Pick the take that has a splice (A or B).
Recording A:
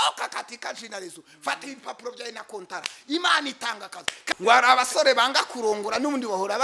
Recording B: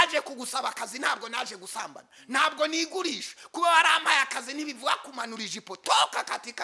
A